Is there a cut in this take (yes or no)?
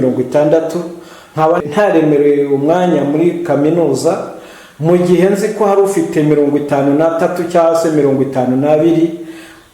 yes